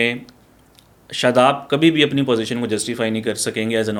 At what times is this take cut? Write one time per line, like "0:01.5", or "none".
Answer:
none

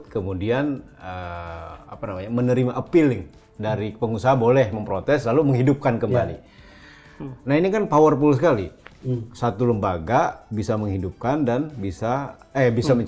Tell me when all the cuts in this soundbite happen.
none

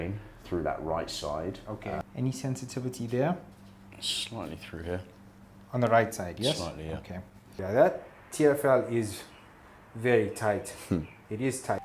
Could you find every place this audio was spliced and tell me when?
0:02.0
0:07.4

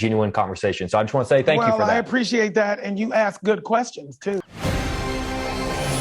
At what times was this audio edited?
0:04.4

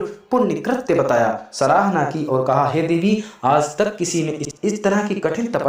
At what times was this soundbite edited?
0:04.5

